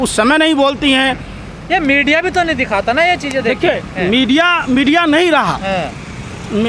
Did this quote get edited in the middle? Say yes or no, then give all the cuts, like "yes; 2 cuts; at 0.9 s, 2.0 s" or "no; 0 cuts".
no; 0 cuts